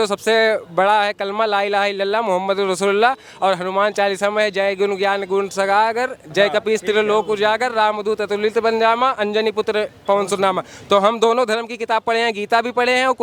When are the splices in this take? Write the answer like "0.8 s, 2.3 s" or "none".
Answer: none